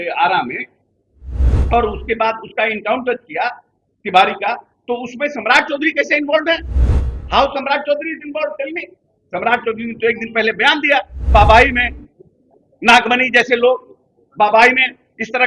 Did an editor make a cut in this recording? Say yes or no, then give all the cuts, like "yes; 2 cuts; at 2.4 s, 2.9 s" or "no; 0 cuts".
yes; 1 cut; at 11.2 s